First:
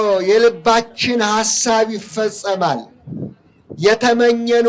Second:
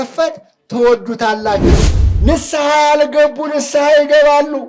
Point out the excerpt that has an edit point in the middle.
second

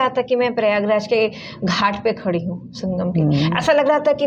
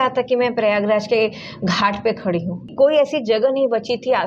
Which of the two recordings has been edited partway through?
second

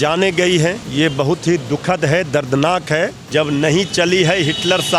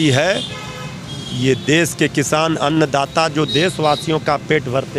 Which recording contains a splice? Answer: first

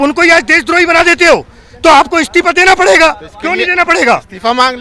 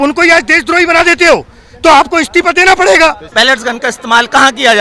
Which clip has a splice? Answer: second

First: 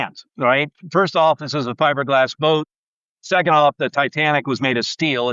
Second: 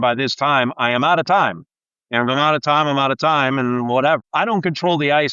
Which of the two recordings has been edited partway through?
second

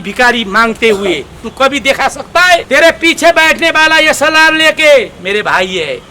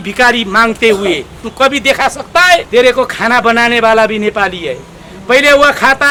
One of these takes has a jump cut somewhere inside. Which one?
first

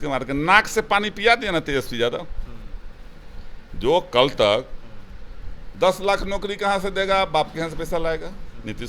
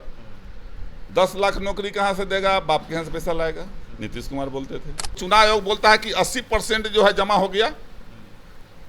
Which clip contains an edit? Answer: second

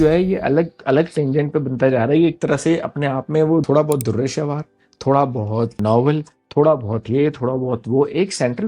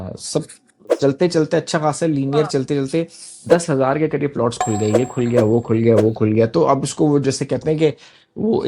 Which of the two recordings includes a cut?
first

